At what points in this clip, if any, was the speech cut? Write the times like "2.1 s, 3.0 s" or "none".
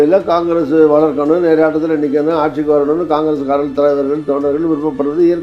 none